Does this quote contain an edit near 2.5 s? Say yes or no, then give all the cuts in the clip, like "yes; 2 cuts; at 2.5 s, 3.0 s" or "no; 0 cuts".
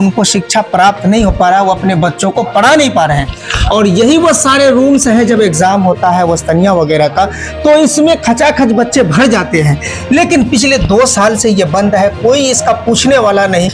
no; 0 cuts